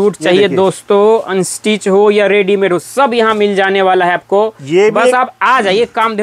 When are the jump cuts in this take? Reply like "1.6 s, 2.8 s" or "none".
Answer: none